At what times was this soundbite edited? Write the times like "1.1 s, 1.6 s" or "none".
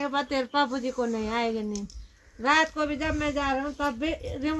none